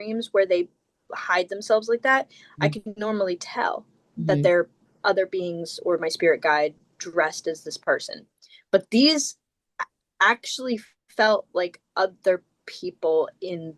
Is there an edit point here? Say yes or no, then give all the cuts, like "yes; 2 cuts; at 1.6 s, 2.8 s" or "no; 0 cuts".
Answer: no; 0 cuts